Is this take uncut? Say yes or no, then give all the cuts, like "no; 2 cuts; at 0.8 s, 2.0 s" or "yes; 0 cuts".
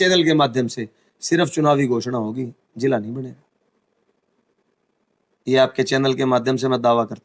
yes; 0 cuts